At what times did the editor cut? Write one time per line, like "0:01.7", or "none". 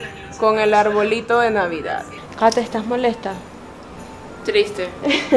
0:02.2

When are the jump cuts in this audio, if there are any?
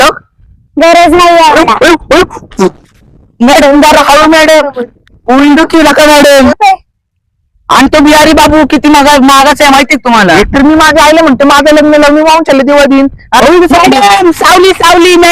0:06.5
0:13.4

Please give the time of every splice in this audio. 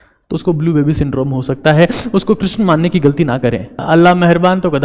0:03.8

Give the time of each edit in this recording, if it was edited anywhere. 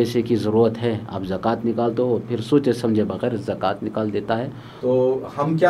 0:04.6

